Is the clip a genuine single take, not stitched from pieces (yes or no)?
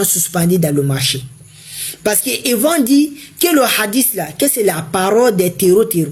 yes